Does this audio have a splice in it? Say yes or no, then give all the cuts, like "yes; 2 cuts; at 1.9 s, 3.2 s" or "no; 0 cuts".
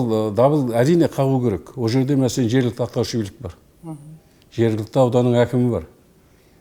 no; 0 cuts